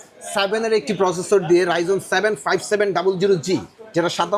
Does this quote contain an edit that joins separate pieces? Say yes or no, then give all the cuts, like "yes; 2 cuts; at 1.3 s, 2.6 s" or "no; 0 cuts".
no; 0 cuts